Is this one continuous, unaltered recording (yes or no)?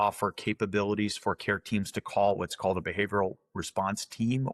yes